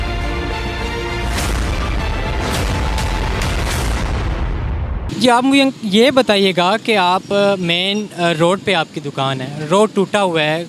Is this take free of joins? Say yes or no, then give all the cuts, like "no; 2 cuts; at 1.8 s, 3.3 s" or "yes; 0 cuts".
yes; 0 cuts